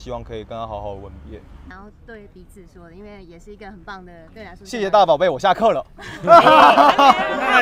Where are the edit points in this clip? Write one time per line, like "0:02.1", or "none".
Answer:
0:01.7